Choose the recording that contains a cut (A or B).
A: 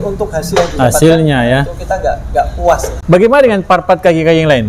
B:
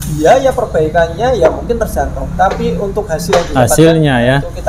A